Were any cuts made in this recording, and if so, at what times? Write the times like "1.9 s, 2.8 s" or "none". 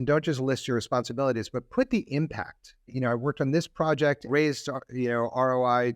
2.9 s, 4.3 s